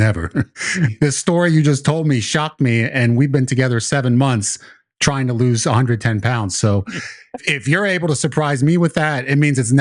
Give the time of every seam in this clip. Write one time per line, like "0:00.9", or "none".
0:00.9
0:07.4